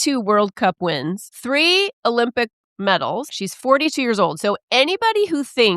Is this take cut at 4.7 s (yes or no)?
no